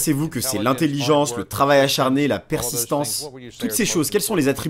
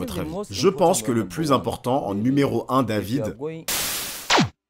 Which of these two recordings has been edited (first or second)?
second